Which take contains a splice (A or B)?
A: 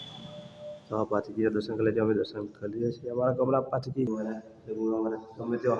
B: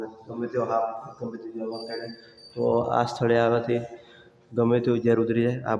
A